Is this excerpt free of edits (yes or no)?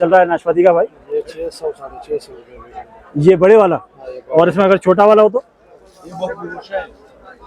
yes